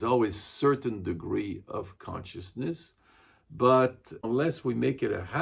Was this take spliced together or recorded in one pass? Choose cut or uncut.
cut